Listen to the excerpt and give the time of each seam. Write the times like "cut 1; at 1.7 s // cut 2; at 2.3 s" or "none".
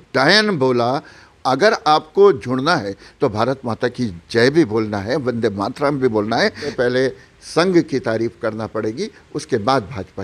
cut 1; at 1.2 s // cut 2; at 6.7 s